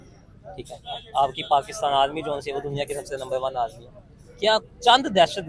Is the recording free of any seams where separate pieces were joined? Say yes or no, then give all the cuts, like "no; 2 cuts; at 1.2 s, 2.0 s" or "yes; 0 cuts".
yes; 0 cuts